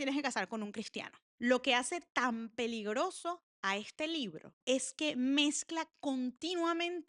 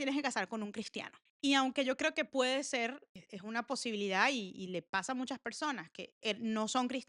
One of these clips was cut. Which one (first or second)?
first